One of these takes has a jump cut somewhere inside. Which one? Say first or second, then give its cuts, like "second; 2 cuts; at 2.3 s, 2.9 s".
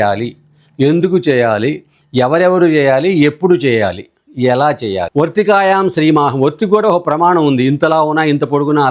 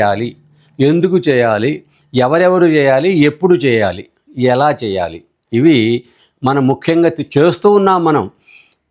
first; 1 cut; at 5.0 s